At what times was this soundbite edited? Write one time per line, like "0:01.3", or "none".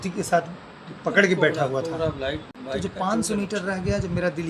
none